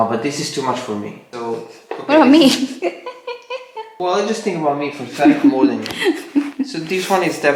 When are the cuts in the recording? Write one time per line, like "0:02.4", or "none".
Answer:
none